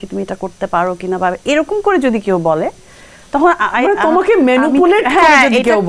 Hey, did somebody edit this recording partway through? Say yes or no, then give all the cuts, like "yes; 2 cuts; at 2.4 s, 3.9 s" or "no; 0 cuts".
no; 0 cuts